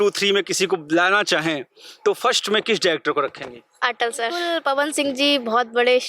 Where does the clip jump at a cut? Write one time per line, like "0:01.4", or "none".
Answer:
0:04.5